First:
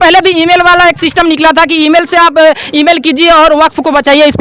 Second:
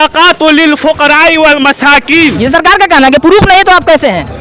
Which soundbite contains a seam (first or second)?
second